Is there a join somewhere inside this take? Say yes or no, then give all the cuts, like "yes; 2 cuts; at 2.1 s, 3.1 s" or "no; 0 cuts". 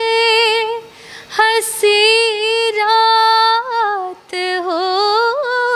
no; 0 cuts